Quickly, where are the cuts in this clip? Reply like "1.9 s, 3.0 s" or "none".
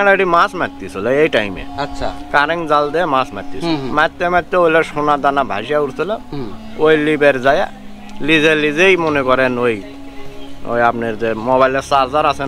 none